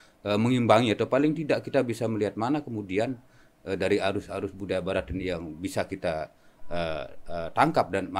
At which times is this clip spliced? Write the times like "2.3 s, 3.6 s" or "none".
none